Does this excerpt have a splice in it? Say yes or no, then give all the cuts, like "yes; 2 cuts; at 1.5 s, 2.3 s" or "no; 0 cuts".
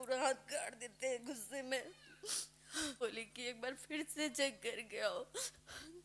yes; 1 cut; at 3.0 s